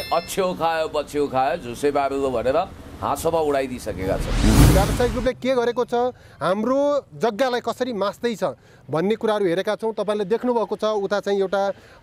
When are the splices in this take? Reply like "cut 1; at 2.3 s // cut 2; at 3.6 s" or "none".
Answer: cut 1; at 4.7 s